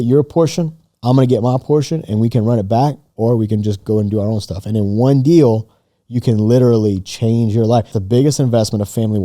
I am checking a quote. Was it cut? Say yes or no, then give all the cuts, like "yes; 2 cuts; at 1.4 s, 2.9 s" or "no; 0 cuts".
yes; 1 cut; at 8.0 s